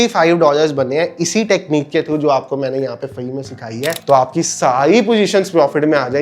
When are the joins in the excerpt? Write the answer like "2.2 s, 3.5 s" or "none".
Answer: 4.0 s